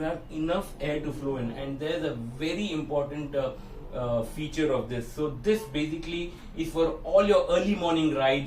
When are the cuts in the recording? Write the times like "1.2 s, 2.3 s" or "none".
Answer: none